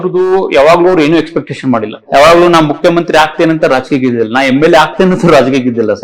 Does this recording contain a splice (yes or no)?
yes